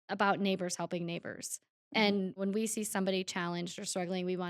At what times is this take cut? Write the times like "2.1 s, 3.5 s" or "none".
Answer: 2.4 s